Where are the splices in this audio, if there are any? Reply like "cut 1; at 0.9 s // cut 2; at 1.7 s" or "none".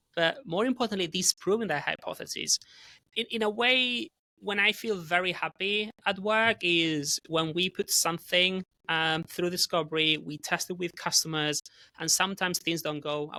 none